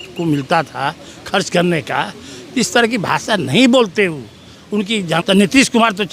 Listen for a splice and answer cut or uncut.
cut